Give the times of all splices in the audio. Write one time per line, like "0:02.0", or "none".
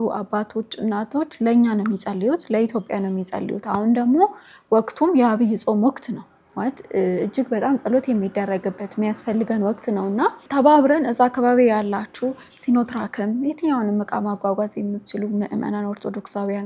none

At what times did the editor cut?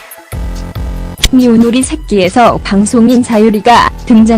0:01.2

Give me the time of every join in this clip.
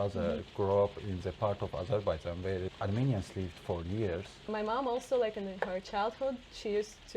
0:02.7
0:04.5

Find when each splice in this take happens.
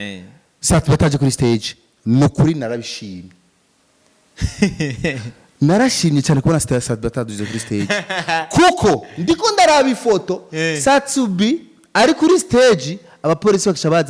none

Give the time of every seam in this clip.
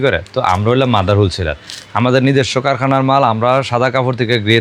none

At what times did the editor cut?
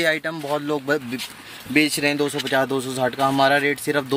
none

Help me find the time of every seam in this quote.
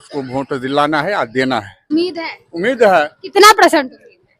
0:01.8

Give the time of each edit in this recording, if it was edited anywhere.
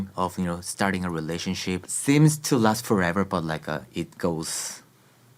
0:01.9

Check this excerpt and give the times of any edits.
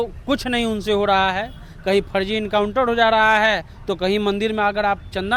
none

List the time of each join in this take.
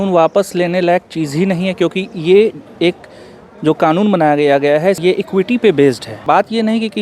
0:05.0
0:06.2

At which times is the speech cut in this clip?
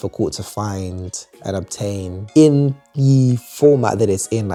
none

